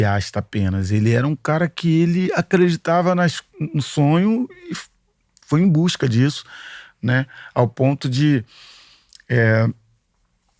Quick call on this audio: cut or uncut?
uncut